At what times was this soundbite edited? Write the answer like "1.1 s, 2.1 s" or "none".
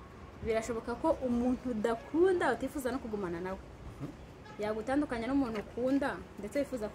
none